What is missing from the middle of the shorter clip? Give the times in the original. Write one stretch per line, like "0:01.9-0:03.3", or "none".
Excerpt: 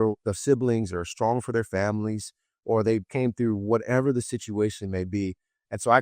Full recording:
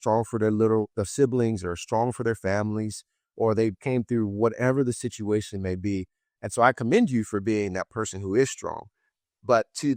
none

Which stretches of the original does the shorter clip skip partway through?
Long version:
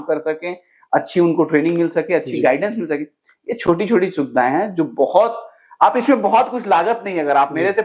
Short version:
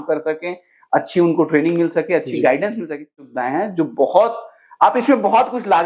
0:03.3-0:04.3

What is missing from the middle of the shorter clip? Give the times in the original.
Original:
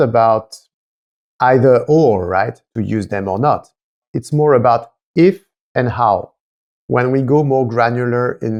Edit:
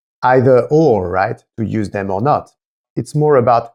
none

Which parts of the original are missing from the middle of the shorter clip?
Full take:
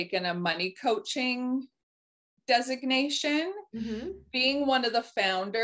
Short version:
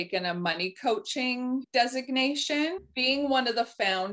0:01.7-0:02.4
0:03.6-0:04.3

